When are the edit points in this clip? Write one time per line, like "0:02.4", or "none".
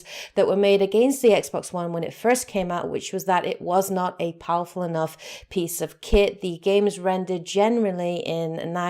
0:03.6